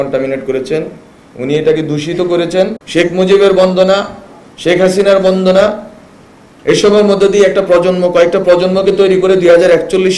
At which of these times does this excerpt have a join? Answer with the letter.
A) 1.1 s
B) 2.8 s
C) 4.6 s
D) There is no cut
B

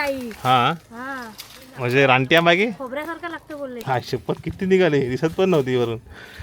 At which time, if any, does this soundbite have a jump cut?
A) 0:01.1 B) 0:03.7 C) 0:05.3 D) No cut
B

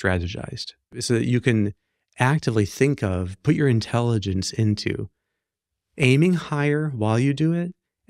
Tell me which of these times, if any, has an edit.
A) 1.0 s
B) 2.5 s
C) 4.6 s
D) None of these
A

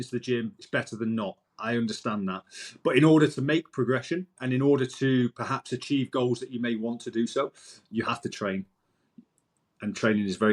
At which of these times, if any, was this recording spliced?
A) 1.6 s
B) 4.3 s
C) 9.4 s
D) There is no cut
B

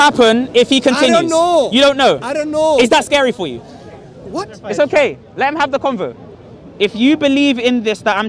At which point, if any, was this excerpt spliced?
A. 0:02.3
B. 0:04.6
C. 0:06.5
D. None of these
B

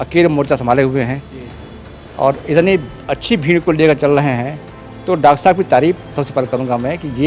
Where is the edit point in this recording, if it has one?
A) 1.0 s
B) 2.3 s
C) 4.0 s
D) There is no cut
D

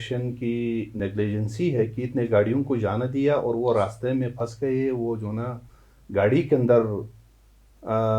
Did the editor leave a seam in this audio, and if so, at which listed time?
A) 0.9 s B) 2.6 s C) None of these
A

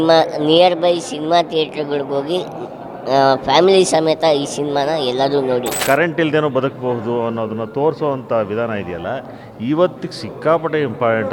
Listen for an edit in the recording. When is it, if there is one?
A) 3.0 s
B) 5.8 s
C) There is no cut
B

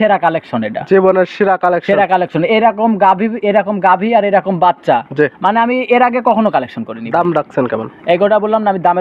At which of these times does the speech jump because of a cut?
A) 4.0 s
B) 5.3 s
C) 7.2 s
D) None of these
D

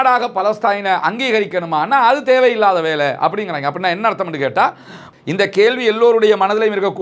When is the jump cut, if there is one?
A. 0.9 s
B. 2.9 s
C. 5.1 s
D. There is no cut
C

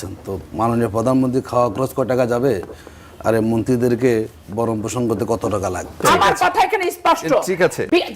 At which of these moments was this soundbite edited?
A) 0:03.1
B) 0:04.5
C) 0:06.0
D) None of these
C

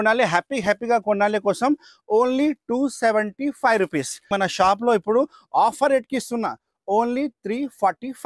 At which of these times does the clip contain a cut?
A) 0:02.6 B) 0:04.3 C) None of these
B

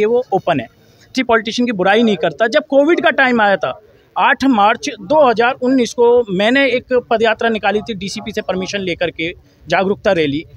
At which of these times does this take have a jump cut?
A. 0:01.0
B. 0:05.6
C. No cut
A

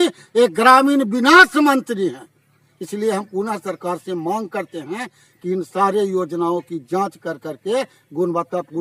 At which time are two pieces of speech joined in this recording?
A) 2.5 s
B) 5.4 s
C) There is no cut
C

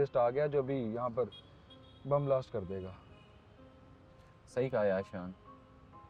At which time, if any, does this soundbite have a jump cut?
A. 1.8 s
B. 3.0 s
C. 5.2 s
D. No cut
D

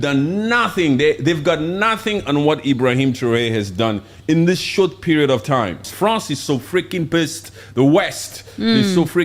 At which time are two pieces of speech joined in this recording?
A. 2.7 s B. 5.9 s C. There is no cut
B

